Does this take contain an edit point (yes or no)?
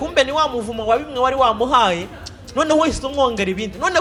no